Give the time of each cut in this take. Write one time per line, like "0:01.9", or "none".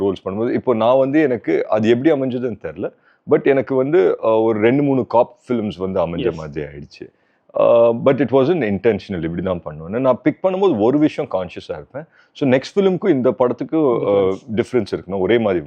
none